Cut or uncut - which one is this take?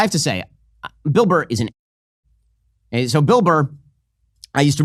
uncut